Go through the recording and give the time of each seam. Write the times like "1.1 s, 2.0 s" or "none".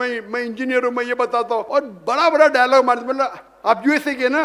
1.7 s

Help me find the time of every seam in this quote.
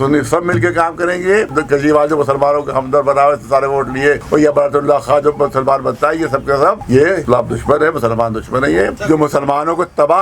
1.5 s, 7.2 s, 9.0 s

